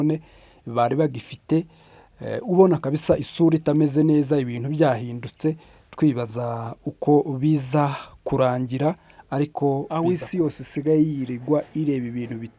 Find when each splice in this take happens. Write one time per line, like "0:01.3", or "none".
0:09.9